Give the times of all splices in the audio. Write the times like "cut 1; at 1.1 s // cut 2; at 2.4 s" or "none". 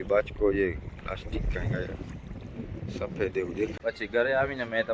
cut 1; at 3.7 s